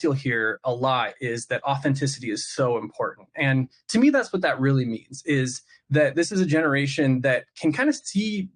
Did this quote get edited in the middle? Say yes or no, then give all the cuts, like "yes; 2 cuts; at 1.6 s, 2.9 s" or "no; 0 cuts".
no; 0 cuts